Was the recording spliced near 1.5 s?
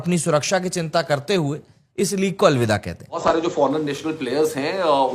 no; 1 cut; at 3.2 s

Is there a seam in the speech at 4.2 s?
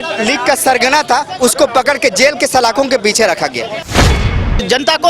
yes; 1 cut; at 4.2 s

